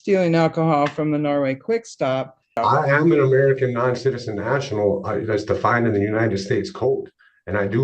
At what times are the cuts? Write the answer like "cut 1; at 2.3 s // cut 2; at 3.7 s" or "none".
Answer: cut 1; at 2.5 s